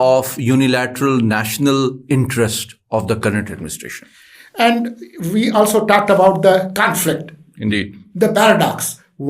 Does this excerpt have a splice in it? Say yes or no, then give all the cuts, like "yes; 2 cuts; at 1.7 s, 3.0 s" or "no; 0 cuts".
no; 0 cuts